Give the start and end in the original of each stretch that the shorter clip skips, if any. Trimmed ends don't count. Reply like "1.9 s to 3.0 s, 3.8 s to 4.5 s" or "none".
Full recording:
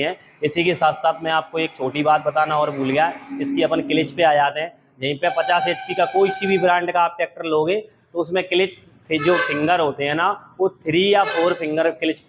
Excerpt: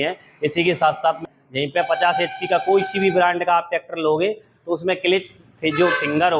1.2 s to 4.7 s